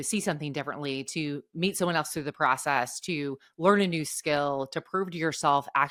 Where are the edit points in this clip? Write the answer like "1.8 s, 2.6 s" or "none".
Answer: none